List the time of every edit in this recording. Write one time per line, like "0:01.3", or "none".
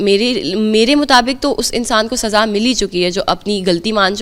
none